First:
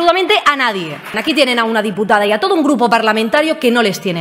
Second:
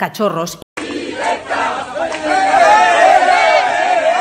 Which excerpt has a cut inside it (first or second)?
first